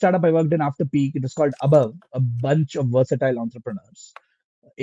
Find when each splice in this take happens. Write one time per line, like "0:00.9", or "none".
none

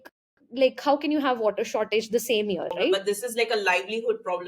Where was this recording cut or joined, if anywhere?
0:03.0

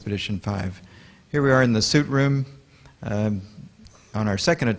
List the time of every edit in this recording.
0:02.2

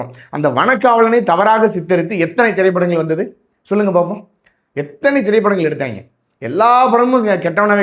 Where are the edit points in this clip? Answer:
none

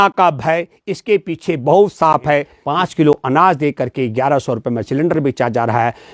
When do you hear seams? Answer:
0:02.6

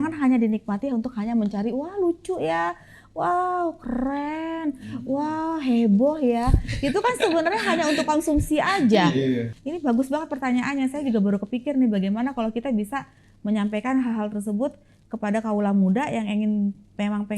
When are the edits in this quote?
0:09.5

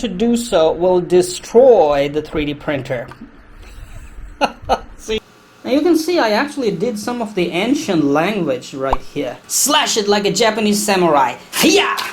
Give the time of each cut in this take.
0:05.4
0:09.5

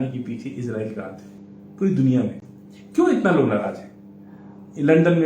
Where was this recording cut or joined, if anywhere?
none

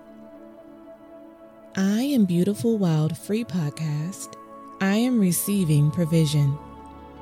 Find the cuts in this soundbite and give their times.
0:01.2

